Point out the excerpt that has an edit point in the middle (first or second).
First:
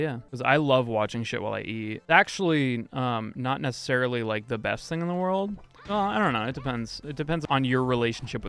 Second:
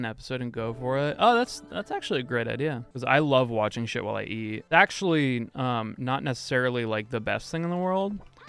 first